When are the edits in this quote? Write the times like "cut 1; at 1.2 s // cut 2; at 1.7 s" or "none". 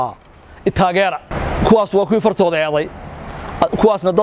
cut 1; at 1.4 s